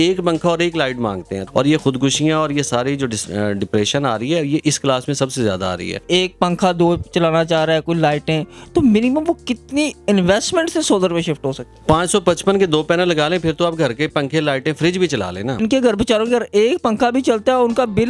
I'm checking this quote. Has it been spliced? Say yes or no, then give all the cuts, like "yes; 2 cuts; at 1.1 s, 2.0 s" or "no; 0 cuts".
yes; 4 cuts; at 1.3 s, 6.0 s, 11.7 s, 15.6 s